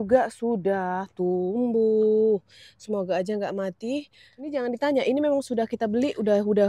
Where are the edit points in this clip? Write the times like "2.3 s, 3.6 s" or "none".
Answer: 4.5 s